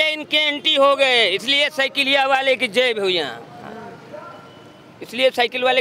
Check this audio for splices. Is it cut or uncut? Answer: uncut